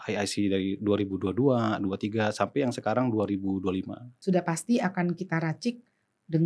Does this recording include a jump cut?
yes; 1 cut; at 4.1 s

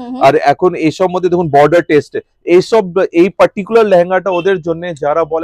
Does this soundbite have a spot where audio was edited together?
no; 0 cuts

